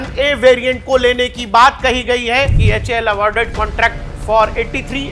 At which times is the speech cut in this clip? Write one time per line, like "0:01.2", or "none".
0:02.6